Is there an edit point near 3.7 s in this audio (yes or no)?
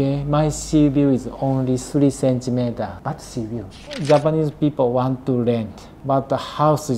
yes